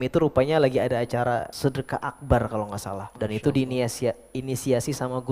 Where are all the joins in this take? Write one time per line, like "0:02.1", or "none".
0:01.5
0:03.1